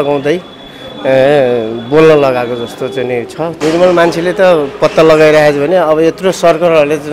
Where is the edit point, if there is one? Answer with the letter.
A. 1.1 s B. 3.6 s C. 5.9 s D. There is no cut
B